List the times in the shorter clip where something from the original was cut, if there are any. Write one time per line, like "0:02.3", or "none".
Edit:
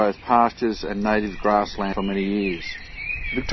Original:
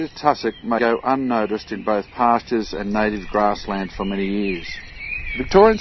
0:01.9